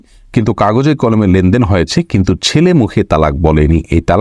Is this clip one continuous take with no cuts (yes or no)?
yes